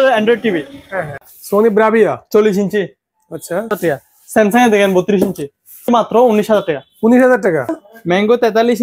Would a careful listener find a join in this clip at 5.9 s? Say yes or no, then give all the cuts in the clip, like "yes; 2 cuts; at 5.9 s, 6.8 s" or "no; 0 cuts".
yes; 4 cuts; at 1.3 s, 3.8 s, 5.9 s, 7.7 s